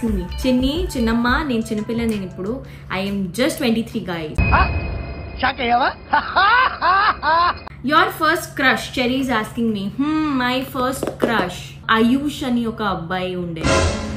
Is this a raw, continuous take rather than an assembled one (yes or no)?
no